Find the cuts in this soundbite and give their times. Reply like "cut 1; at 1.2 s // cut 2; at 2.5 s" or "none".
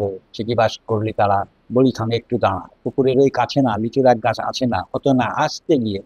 none